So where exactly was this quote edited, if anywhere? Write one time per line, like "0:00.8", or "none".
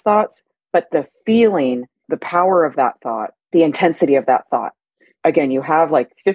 0:02.1
0:03.3
0:05.2